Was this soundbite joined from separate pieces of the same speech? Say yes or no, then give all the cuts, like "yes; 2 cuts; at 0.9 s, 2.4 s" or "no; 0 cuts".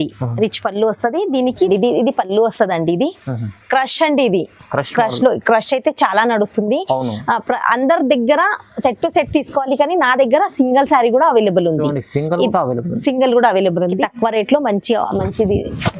yes; 2 cuts; at 1.7 s, 14.0 s